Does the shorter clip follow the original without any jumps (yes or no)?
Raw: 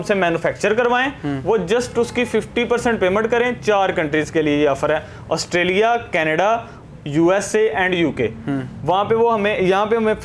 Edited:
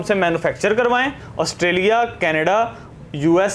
no